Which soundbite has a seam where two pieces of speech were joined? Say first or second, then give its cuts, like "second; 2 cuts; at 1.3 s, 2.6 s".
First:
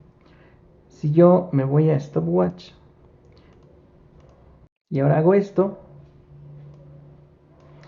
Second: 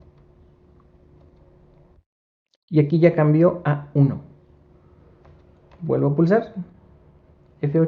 first; 1 cut; at 4.7 s